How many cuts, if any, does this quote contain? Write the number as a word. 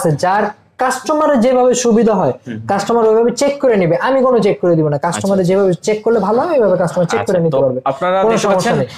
zero